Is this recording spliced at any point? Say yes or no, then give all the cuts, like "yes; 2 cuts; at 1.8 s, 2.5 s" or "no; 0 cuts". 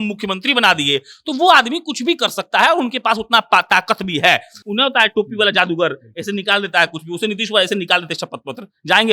yes; 1 cut; at 4.6 s